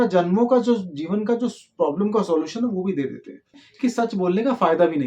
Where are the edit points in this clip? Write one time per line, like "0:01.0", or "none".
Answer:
0:03.6